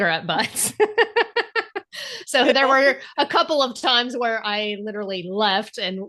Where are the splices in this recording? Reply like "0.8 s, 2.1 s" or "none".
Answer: none